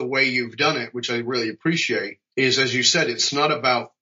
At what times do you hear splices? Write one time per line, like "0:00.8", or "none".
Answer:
0:02.2

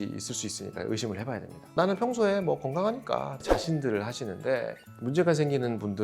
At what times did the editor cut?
0:01.7
0:03.3

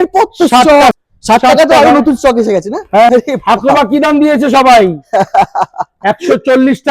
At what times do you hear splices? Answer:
0:00.9
0:03.1

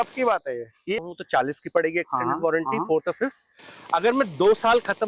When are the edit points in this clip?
0:01.0

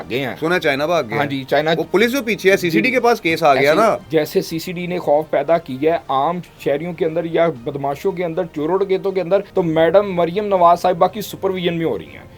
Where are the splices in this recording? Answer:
0:04.0
0:09.5

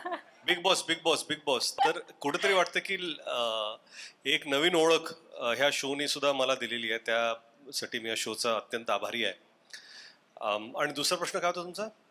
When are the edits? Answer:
none

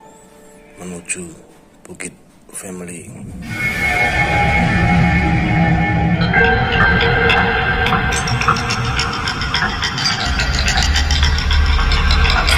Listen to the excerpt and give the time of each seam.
none

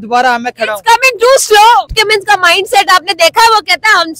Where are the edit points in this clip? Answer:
0:01.9

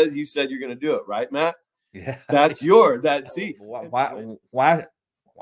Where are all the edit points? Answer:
0:03.7

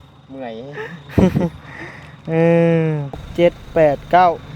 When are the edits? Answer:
0:03.3

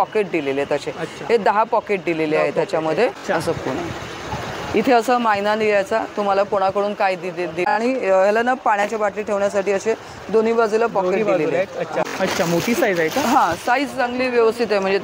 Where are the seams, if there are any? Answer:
0:03.2
0:07.8
0:12.0

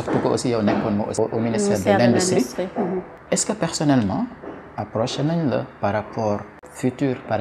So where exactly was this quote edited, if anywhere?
0:01.1
0:03.1
0:06.5

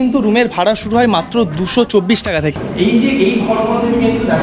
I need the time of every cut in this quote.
0:02.6

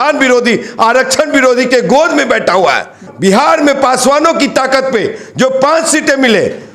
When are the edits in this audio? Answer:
0:03.1

